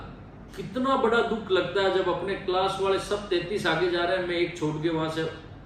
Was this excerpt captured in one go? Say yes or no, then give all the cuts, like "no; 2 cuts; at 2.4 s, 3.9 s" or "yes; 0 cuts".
yes; 0 cuts